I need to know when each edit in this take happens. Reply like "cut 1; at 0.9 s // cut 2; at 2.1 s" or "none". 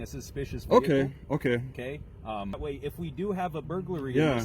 cut 1; at 2.6 s